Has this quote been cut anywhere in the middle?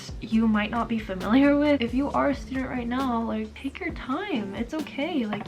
yes; 2 cuts; at 1.8 s, 3.5 s

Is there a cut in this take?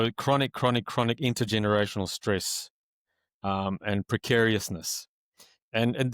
no; 0 cuts

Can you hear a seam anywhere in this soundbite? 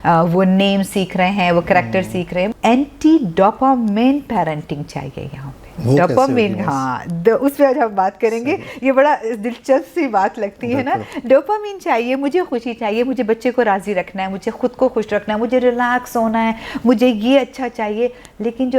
yes; 1 cut; at 2.5 s

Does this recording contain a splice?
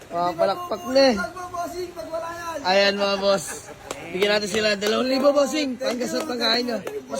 no; 0 cuts

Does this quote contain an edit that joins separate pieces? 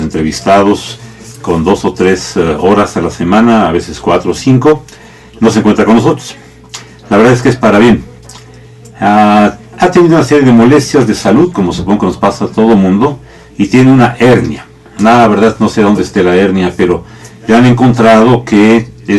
yes; 1 cut; at 10.4 s

